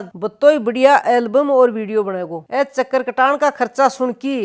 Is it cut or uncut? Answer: cut